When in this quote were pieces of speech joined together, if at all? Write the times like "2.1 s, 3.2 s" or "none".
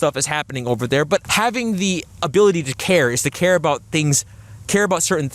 1.3 s